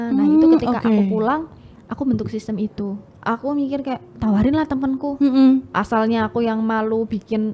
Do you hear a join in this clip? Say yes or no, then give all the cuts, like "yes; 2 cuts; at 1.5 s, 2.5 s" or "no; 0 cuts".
yes; 1 cut; at 3.1 s